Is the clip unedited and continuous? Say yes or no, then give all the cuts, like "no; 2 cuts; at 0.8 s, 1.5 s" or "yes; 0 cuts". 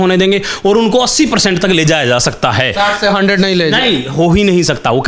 yes; 0 cuts